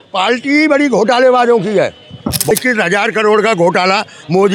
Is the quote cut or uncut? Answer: cut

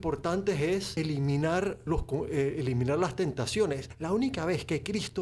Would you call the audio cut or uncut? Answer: cut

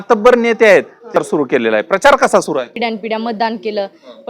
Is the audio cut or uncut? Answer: cut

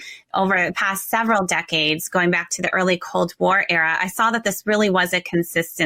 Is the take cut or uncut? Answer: uncut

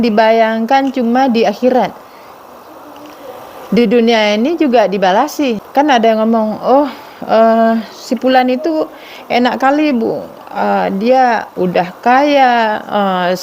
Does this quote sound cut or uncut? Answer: cut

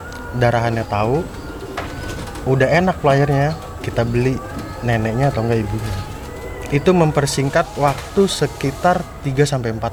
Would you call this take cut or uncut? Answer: uncut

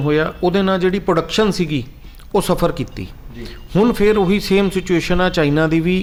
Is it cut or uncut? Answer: uncut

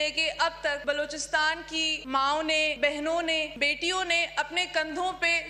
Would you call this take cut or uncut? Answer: cut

